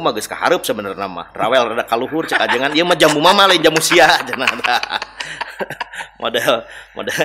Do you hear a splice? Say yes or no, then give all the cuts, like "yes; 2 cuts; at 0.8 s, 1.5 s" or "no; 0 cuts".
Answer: no; 0 cuts